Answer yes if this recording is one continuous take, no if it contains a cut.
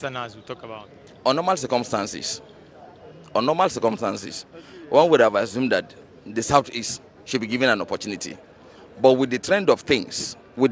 yes